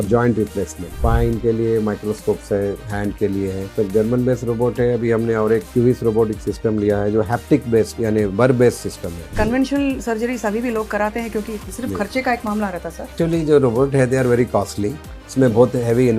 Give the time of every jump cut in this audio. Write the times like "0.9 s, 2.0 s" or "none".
1.0 s, 3.7 s, 5.7 s, 9.2 s, 11.6 s, 13.1 s